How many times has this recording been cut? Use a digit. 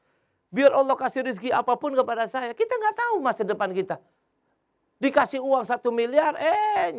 0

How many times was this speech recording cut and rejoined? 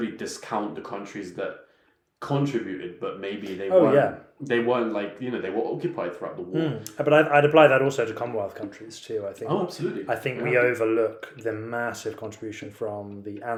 0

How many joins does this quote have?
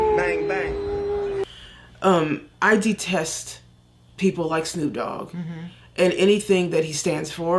1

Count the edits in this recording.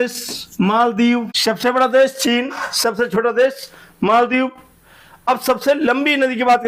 1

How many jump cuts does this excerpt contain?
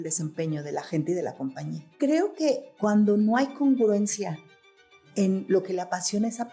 1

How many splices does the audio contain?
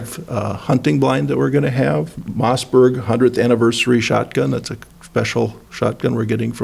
1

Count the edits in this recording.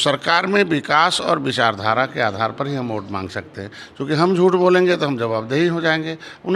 0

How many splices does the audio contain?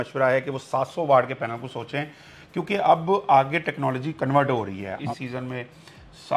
1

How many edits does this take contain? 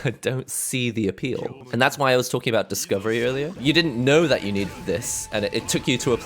2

